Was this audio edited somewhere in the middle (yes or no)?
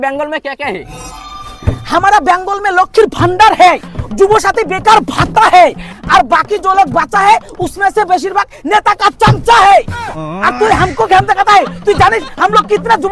no